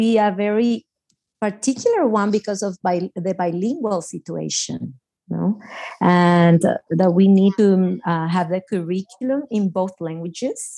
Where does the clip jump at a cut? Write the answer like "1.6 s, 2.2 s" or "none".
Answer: none